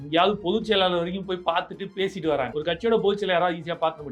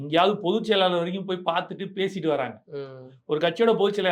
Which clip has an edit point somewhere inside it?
first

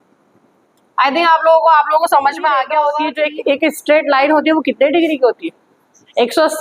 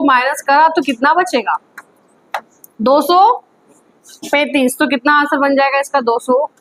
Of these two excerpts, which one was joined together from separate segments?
first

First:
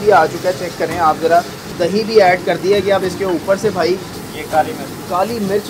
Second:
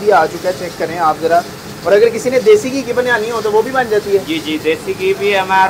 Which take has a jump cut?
first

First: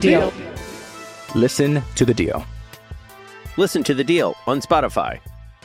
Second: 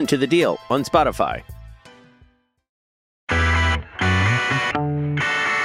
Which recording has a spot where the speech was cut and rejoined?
second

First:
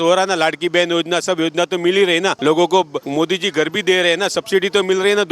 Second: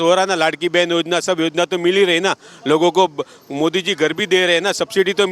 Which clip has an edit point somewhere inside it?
first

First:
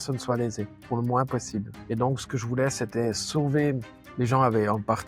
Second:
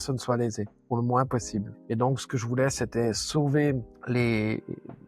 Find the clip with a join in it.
first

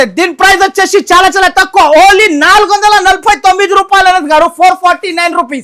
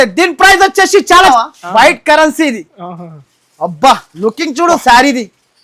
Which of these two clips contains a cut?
second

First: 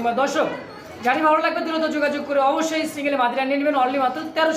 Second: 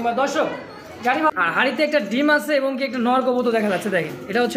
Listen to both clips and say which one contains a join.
second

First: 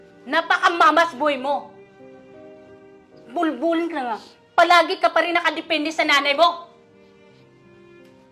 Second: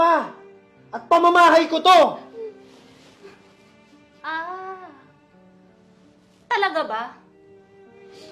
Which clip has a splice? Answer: first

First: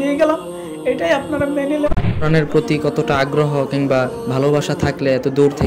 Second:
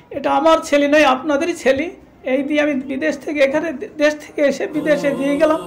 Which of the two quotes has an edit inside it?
first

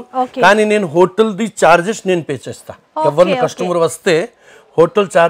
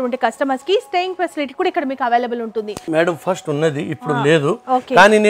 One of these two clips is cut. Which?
second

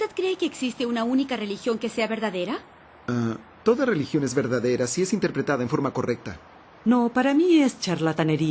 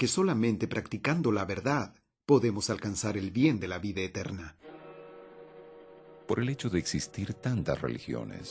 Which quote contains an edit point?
second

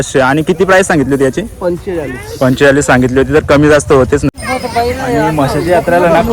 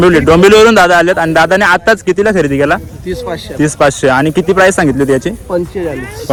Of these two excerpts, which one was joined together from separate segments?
first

